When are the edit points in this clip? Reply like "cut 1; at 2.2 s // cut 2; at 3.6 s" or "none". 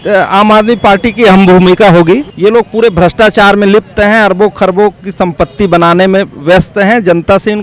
cut 1; at 2.3 s